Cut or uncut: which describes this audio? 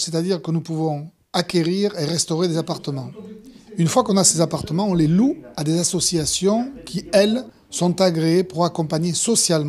uncut